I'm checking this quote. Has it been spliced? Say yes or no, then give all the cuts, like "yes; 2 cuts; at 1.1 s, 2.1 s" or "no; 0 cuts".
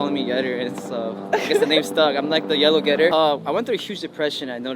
yes; 1 cut; at 3.1 s